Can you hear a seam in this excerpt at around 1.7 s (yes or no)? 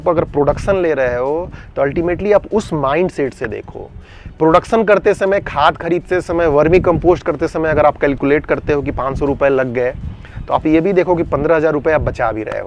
no